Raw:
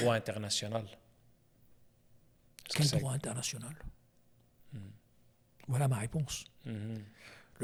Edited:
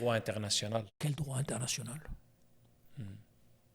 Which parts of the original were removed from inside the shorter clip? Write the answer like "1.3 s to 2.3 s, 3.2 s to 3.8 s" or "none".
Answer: 0.9 s to 2.7 s